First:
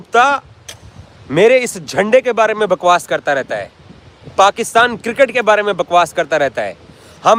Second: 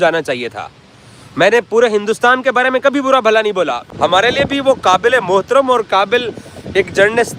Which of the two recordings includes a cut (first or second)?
second